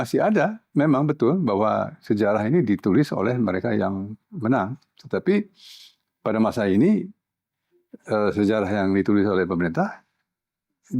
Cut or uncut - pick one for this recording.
uncut